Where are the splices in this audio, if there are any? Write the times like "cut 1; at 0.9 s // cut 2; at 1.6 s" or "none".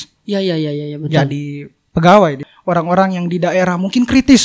cut 1; at 2.5 s

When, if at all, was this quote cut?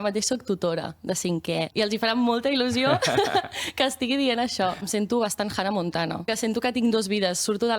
cut 1; at 1.7 s // cut 2; at 4.8 s // cut 3; at 6.3 s

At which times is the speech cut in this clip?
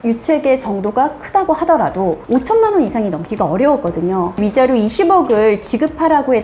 cut 1; at 4.4 s

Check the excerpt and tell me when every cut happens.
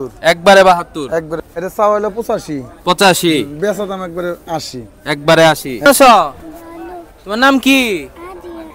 cut 1; at 1.3 s // cut 2; at 5.8 s

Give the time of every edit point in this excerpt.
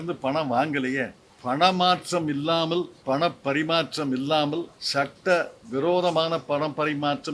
cut 1; at 1.3 s // cut 2; at 2.9 s // cut 3; at 4.8 s

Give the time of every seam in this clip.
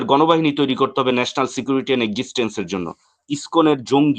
cut 1; at 3.3 s

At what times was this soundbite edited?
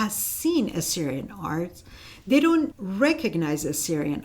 cut 1; at 2.8 s

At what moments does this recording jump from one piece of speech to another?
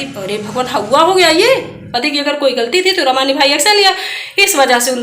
cut 1; at 1.8 s

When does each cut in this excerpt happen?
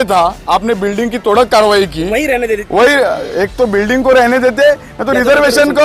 none

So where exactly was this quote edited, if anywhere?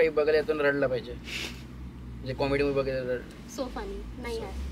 none

